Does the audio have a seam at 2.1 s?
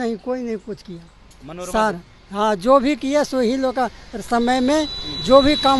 no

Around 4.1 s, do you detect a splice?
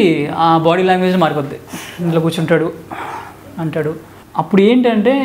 yes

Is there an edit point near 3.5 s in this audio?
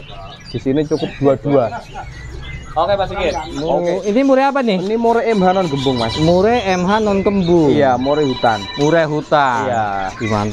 yes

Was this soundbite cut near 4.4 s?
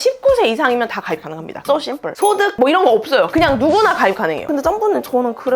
yes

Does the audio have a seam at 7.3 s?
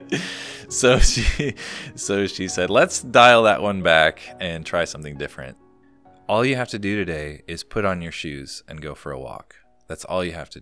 no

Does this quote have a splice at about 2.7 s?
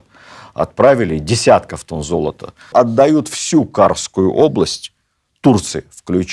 yes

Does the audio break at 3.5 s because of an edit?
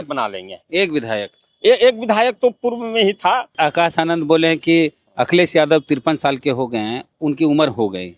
yes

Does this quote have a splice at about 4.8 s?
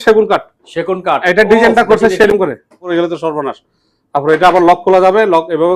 no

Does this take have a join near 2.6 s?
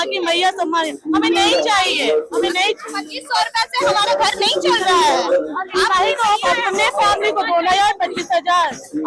no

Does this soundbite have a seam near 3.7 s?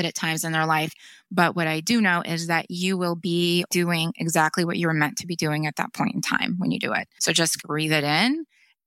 yes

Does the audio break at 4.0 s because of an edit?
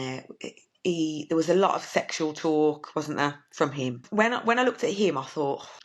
yes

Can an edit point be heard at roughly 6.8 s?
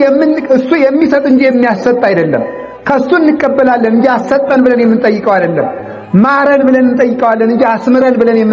no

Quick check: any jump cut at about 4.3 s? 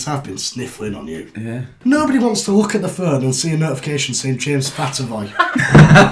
no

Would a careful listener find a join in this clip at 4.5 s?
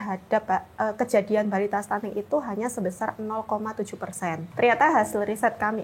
yes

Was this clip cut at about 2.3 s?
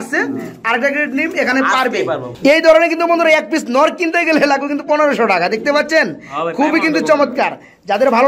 yes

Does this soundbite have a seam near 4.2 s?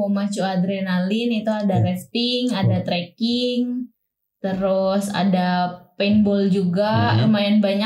no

